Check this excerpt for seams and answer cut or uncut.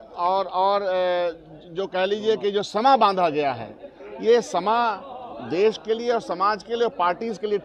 uncut